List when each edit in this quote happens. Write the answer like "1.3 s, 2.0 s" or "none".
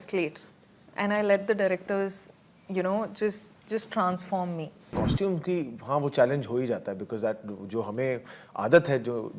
4.9 s